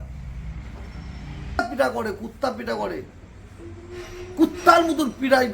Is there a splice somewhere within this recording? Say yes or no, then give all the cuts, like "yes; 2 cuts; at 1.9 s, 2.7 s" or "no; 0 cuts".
yes; 1 cut; at 1.6 s